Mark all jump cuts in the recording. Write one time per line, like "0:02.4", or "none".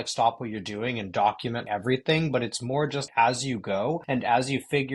0:01.6
0:03.1
0:04.0